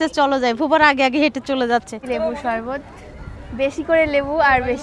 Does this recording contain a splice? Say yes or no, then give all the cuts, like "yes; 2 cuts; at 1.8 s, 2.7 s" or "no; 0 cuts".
yes; 1 cut; at 2.0 s